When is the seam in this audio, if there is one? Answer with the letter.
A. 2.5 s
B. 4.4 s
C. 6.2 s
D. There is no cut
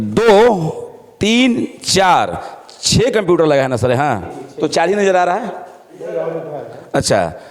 D